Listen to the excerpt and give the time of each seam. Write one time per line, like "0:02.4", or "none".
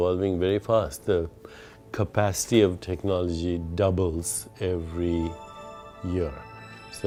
none